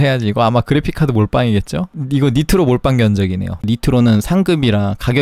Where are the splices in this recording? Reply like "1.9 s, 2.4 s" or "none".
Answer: 2.0 s, 3.6 s